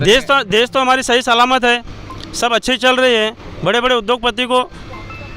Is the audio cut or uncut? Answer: uncut